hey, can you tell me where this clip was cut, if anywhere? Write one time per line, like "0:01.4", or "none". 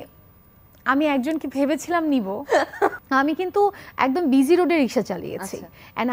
0:02.9